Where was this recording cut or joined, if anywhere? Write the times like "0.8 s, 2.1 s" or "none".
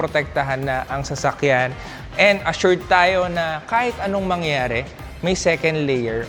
none

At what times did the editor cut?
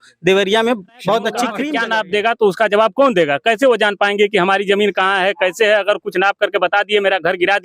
1.7 s

